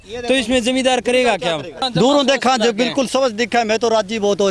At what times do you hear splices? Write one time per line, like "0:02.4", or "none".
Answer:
0:01.8